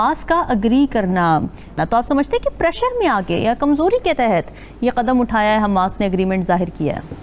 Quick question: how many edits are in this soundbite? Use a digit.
1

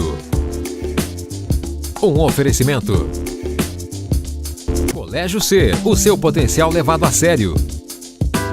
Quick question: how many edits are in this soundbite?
1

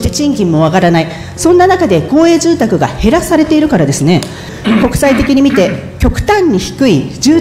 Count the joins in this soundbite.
1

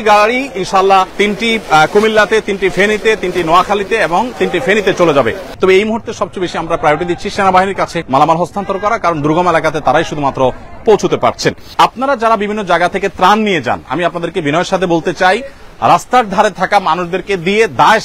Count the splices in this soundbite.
4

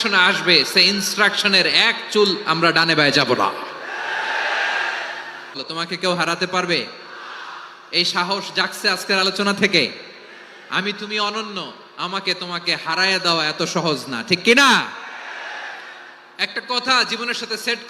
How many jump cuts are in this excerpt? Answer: 1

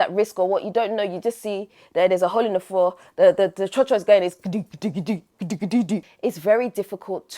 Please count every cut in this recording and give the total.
1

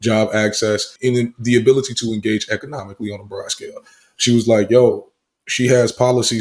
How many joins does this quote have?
1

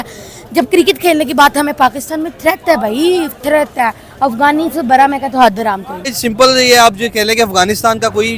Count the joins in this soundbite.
1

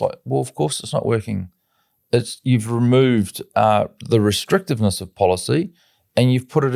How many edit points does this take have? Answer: 0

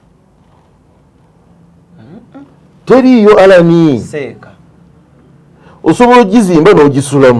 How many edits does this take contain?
0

